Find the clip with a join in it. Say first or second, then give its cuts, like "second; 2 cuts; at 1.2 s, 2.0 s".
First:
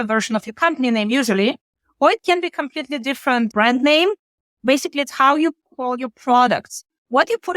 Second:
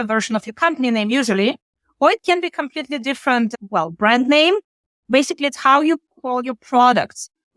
first; 1 cut; at 3.5 s